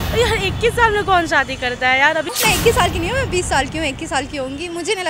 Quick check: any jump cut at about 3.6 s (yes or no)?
no